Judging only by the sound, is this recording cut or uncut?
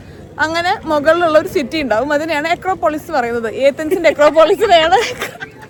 uncut